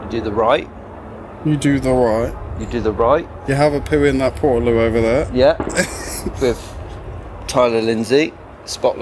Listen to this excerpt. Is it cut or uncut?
uncut